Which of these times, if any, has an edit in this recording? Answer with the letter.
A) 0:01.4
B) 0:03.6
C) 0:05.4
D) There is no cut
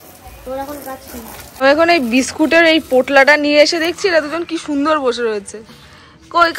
A